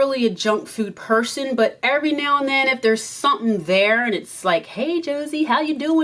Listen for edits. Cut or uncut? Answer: uncut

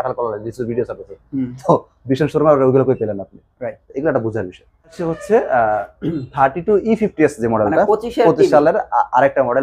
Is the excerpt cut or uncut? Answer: cut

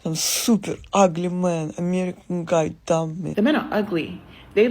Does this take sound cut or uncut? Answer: cut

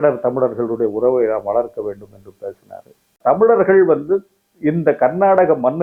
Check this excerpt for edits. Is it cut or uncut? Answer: cut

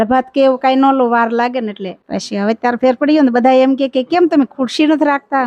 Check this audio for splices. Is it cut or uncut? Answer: cut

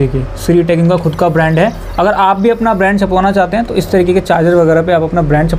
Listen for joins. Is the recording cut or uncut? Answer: uncut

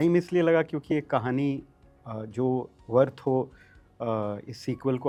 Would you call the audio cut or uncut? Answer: uncut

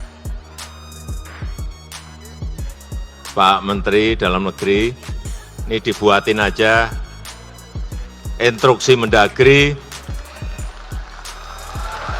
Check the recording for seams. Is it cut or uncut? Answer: cut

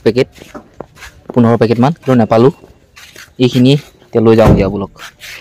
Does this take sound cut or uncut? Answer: uncut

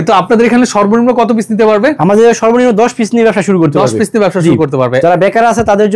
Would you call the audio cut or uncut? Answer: uncut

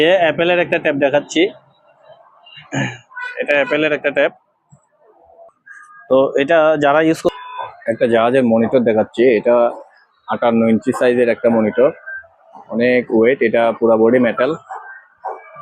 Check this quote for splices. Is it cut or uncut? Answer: cut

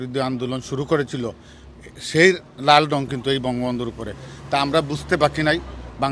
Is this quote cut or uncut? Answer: uncut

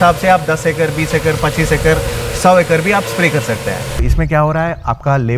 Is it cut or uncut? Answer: cut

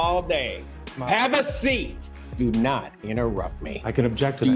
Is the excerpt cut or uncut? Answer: cut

